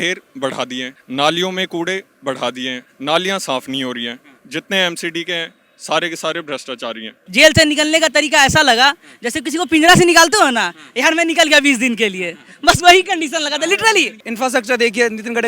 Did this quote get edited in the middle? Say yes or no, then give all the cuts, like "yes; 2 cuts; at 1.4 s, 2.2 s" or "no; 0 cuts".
yes; 4 cuts; at 1.0 s, 2.9 s, 7.1 s, 14.3 s